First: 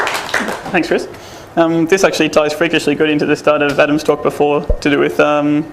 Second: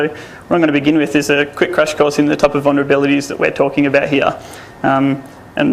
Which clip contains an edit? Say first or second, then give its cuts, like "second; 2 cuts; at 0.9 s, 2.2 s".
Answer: first; 1 cut; at 4.6 s